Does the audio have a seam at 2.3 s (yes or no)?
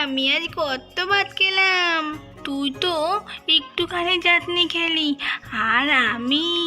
yes